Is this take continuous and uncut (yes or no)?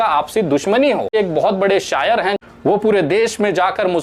no